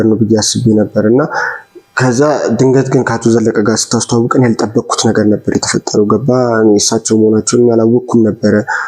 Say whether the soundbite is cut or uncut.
uncut